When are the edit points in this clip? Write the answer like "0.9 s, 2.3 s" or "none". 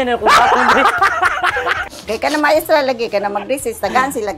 1.9 s